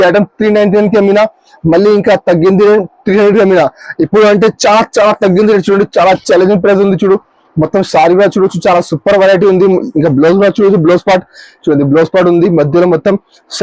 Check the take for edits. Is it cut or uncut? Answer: uncut